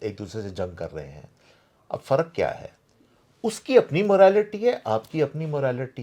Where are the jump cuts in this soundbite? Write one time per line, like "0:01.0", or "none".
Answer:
none